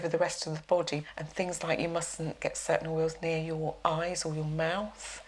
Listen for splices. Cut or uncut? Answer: cut